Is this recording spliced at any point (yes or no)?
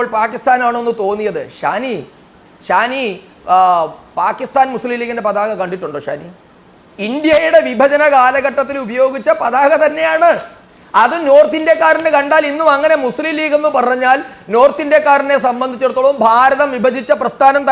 no